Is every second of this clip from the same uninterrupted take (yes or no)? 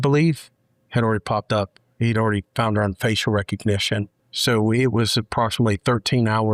yes